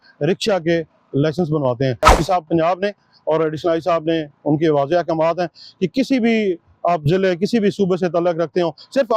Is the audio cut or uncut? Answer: cut